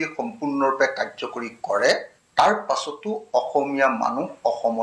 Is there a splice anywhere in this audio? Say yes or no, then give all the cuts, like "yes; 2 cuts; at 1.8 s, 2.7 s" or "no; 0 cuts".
yes; 1 cut; at 2.2 s